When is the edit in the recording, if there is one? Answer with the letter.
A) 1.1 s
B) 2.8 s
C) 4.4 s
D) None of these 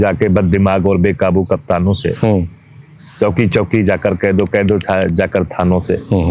D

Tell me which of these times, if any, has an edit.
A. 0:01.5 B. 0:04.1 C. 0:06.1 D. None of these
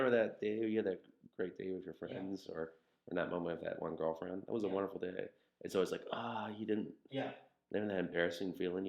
D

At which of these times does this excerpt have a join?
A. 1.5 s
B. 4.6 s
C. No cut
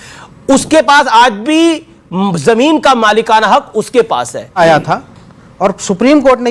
B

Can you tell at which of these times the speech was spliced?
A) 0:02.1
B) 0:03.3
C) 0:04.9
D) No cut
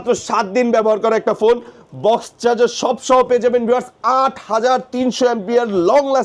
D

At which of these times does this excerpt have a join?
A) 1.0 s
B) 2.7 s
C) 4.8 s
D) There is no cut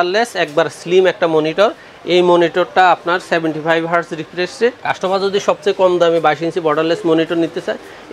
C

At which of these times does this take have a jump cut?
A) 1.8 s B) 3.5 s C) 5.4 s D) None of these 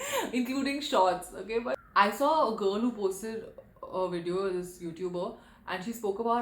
A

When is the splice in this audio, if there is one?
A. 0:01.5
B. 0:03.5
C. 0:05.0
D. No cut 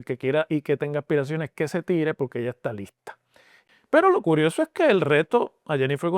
B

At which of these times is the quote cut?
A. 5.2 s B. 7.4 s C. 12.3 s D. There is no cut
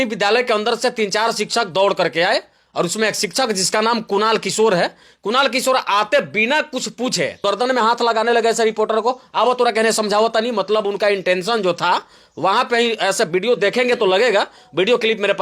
B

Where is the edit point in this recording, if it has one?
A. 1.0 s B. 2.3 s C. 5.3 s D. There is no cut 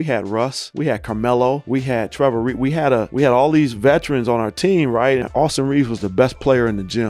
C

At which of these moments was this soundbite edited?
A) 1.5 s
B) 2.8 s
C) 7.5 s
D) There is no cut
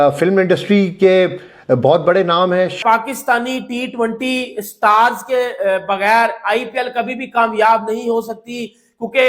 B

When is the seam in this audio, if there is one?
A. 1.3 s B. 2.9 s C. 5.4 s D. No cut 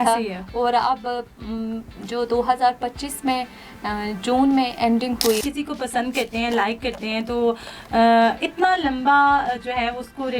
C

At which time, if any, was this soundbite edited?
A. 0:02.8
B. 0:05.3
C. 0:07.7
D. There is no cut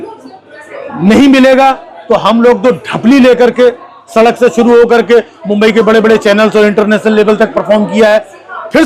D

